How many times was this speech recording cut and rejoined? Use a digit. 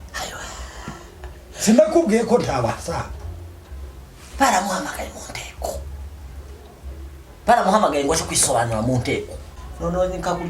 1